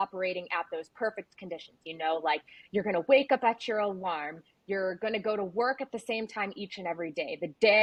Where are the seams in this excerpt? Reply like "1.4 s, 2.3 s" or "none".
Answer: none